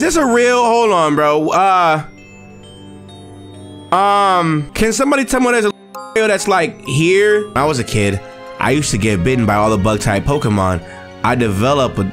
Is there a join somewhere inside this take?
yes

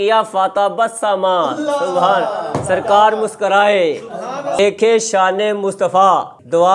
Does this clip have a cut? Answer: yes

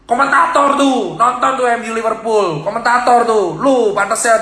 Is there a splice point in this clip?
no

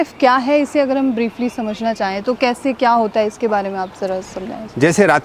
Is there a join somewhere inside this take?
no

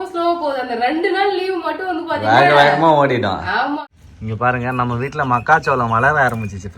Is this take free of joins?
no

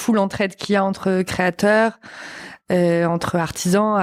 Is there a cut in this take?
no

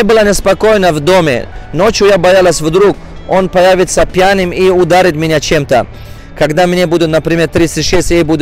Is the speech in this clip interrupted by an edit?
yes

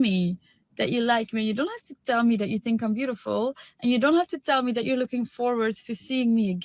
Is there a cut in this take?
no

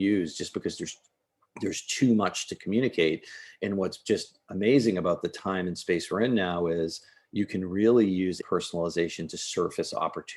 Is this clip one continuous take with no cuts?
no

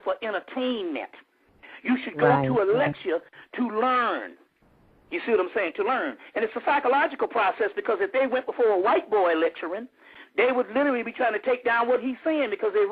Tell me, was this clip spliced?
yes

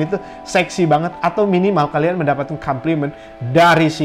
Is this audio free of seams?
yes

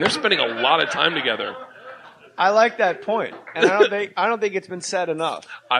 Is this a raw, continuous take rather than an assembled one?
no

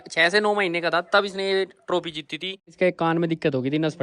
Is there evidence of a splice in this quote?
yes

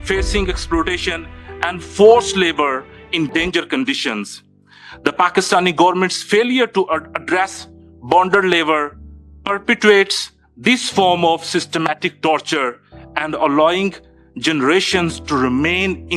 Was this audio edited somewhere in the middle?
yes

